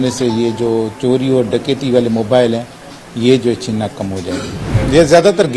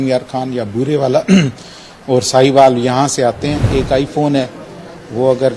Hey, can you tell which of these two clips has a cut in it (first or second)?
second